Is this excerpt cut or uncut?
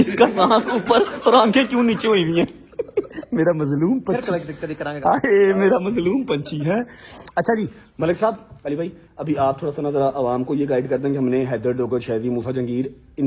uncut